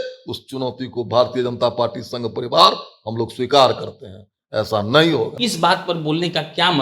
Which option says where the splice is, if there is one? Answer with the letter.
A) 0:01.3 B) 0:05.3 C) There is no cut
B